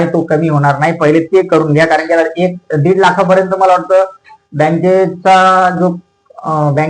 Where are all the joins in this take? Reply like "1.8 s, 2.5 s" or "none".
none